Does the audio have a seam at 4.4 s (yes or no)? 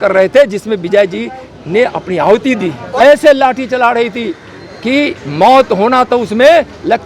no